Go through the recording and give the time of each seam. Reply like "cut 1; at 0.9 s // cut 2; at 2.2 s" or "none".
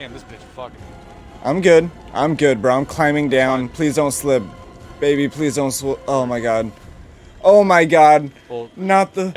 none